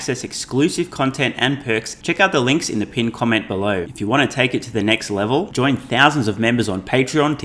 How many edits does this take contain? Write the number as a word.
two